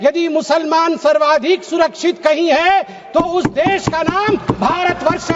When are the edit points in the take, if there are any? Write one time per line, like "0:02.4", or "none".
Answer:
none